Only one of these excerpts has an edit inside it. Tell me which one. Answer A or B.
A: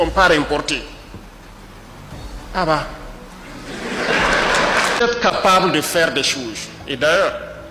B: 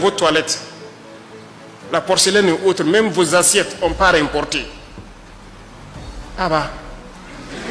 A